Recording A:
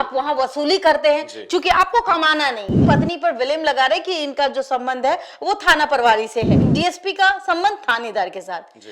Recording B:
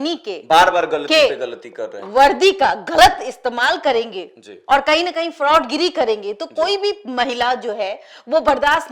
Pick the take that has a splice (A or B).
A